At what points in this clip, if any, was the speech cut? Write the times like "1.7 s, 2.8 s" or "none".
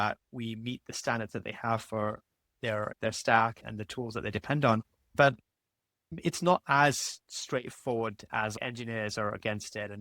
3.0 s, 6.1 s, 8.5 s